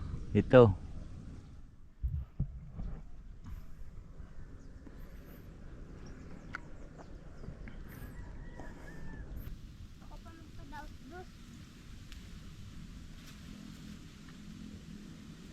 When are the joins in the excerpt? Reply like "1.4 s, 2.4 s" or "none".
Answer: 9.5 s